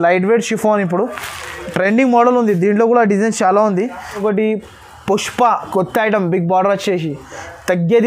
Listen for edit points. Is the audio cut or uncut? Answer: cut